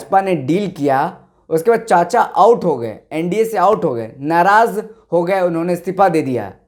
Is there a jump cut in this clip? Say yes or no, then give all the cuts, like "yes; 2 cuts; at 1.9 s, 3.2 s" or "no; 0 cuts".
no; 0 cuts